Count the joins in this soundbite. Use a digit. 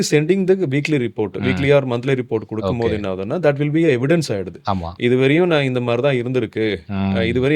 0